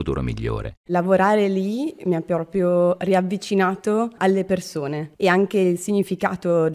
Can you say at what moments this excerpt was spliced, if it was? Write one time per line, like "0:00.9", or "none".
0:00.9